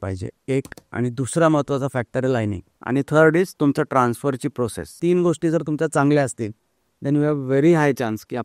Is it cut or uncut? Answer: cut